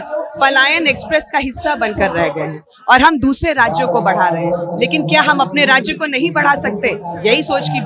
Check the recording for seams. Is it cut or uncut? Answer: uncut